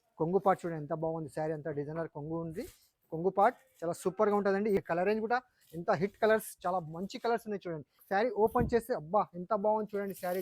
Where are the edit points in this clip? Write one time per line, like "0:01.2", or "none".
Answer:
0:04.8
0:08.0